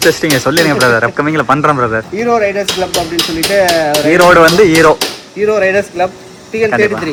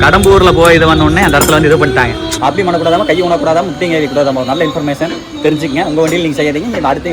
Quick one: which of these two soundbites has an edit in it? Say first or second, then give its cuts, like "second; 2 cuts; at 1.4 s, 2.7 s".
second; 1 cut; at 2.3 s